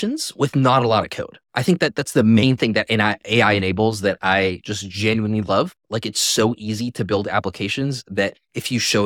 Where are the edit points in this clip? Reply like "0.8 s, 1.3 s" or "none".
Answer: none